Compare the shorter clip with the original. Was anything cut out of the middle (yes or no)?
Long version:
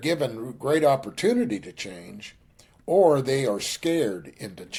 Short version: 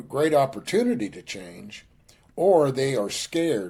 no